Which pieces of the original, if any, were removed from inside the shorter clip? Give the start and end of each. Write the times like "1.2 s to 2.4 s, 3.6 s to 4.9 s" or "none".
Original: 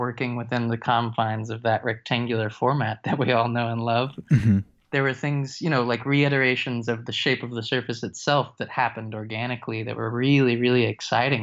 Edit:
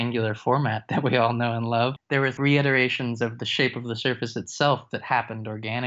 4.4 s to 5.9 s